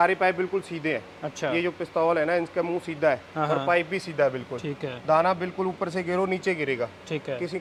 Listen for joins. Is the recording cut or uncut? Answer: uncut